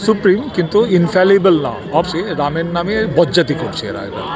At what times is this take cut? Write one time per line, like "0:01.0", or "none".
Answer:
0:02.1